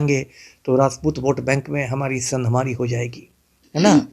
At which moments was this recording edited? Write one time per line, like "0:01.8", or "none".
none